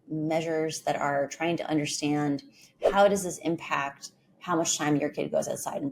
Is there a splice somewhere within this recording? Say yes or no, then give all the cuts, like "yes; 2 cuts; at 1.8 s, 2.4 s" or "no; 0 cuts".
no; 0 cuts